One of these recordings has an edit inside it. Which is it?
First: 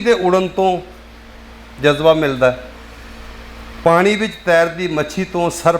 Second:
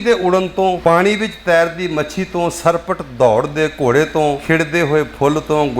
second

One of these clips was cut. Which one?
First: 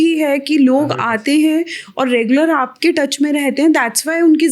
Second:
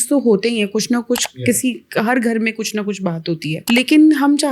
second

